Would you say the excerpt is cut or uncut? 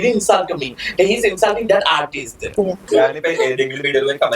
cut